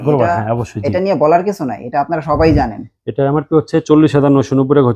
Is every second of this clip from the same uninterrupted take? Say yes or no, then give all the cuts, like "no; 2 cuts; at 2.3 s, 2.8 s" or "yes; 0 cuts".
yes; 0 cuts